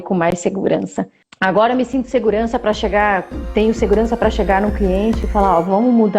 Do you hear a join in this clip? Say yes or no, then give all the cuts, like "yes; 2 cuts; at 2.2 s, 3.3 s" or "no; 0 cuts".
yes; 1 cut; at 1.2 s